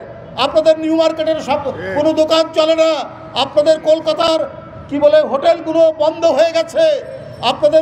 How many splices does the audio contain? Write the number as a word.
zero